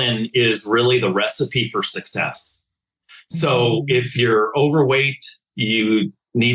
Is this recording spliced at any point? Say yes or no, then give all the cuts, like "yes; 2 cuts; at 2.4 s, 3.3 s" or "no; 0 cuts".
no; 0 cuts